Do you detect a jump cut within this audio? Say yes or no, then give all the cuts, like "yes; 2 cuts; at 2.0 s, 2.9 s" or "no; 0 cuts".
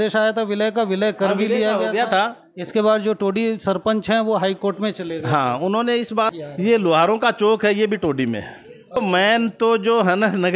yes; 2 cuts; at 6.4 s, 9.0 s